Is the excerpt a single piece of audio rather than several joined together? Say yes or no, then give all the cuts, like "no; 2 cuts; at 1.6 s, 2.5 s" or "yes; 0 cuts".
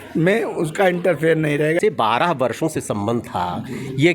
no; 1 cut; at 1.8 s